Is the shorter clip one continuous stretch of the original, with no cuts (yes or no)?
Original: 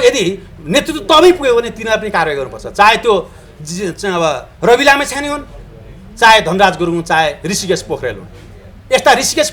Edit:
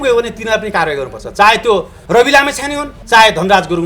no